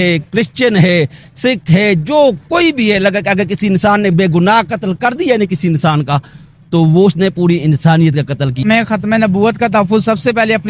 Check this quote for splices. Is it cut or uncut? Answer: cut